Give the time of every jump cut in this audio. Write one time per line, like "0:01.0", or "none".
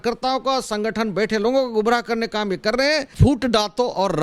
0:03.1